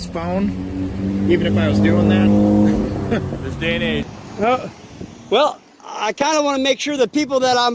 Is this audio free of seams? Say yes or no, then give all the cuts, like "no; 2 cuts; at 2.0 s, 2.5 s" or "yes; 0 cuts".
no; 1 cut; at 4.0 s